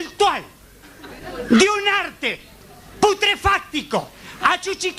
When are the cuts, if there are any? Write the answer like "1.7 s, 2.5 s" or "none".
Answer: 1.9 s